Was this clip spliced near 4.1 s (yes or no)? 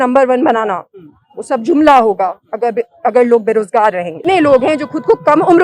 yes